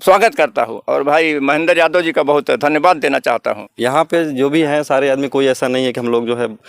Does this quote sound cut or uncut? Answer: cut